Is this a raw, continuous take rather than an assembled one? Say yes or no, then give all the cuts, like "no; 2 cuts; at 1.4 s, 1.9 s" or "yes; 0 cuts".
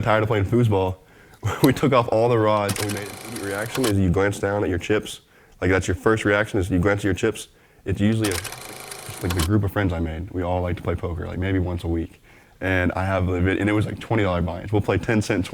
no; 2 cuts; at 3.4 s, 8.7 s